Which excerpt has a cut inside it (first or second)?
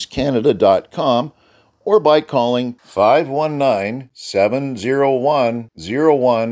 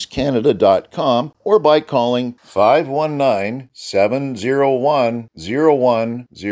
second